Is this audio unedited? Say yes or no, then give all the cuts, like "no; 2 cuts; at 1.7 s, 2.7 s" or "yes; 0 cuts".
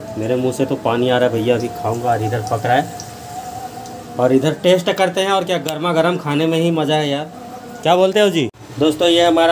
no; 1 cut; at 8.6 s